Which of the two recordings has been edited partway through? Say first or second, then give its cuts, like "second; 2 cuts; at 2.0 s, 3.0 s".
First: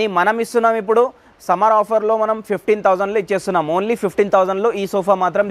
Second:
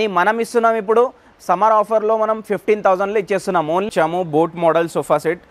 second; 1 cut; at 3.9 s